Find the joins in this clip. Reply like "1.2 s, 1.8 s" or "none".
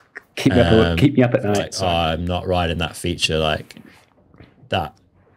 1.7 s